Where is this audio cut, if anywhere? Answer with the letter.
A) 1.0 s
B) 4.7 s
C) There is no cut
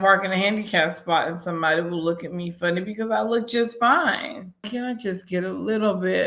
B